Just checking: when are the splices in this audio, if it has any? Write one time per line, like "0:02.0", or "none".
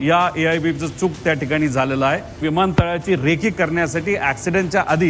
0:02.4